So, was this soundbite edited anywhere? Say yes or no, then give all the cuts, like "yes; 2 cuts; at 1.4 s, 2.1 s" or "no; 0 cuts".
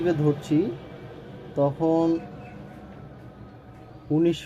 no; 0 cuts